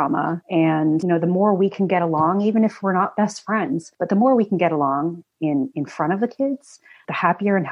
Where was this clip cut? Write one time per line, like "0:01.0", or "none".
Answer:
0:00.9
0:03.9